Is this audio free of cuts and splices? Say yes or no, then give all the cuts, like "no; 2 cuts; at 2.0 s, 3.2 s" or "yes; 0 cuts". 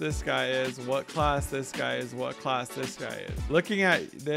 no; 1 cut; at 3.3 s